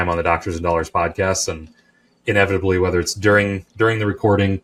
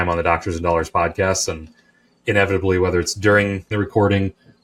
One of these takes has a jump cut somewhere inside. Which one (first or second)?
second